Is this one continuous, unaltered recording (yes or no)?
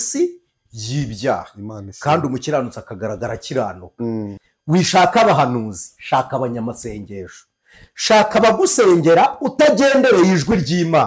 no